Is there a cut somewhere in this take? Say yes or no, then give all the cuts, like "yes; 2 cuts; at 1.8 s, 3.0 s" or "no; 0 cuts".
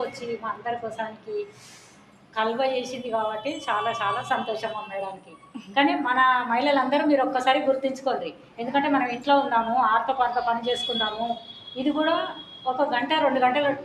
no; 0 cuts